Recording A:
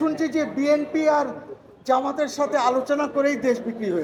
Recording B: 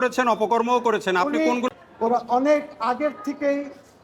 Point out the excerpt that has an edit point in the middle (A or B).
B